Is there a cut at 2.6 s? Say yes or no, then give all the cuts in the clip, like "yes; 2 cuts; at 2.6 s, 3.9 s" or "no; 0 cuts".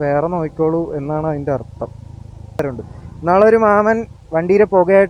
yes; 1 cut; at 2.6 s